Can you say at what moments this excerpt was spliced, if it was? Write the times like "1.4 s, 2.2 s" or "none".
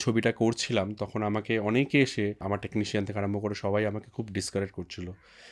2.4 s